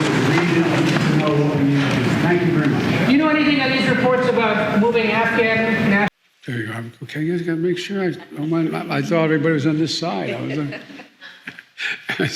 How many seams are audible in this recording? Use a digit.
1